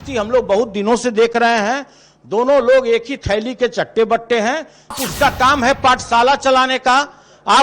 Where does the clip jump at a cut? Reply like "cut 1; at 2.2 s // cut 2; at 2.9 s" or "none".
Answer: cut 1; at 5.1 s